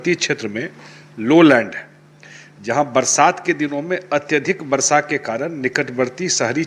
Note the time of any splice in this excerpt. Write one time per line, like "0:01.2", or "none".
none